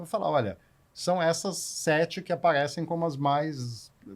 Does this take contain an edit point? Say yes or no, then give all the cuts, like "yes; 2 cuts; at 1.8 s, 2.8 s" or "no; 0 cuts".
no; 0 cuts